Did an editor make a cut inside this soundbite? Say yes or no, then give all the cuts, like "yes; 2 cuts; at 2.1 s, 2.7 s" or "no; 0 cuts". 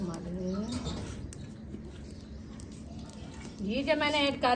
no; 0 cuts